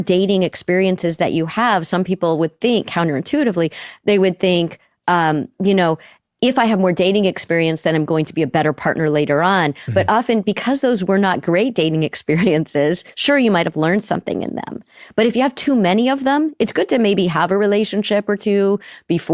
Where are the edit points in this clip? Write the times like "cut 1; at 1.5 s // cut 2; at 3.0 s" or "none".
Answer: none